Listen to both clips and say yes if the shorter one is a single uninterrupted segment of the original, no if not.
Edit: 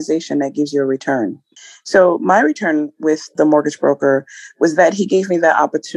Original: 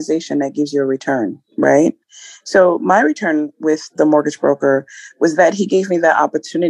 no